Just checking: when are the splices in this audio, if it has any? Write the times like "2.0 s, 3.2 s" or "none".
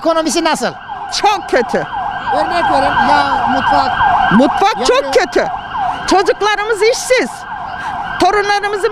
none